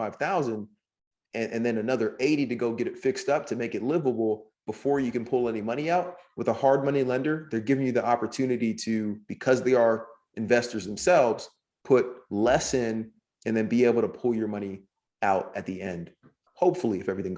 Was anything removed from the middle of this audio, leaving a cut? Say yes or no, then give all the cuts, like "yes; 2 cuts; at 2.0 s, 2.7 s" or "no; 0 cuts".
yes; 1 cut; at 16.4 s